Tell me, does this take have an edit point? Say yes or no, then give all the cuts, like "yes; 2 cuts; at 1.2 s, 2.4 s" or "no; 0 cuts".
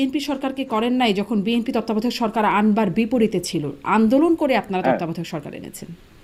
no; 0 cuts